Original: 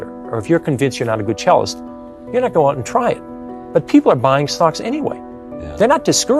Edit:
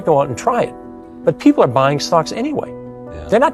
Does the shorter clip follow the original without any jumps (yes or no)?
yes